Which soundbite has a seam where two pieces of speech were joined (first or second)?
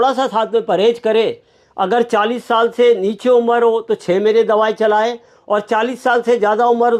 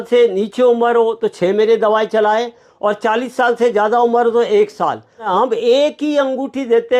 second